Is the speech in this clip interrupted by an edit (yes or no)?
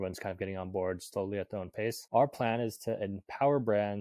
yes